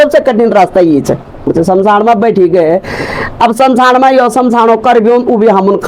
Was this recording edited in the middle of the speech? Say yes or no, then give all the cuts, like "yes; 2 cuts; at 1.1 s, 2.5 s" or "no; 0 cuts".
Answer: yes; 1 cut; at 1.5 s